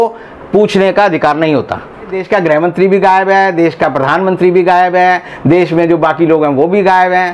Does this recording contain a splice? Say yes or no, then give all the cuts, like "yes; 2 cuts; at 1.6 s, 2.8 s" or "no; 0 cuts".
yes; 1 cut; at 2.2 s